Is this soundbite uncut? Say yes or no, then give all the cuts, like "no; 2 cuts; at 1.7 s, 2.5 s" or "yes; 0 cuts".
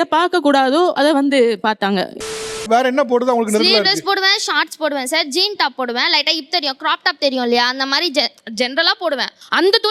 no; 1 cut; at 2.6 s